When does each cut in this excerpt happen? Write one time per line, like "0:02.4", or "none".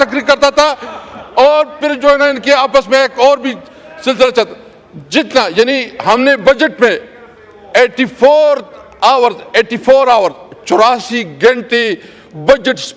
none